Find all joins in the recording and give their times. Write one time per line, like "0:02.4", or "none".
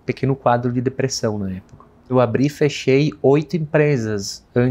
0:02.1